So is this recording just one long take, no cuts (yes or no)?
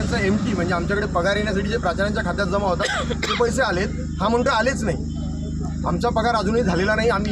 yes